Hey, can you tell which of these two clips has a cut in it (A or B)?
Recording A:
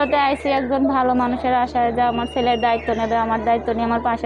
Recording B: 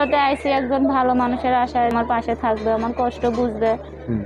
B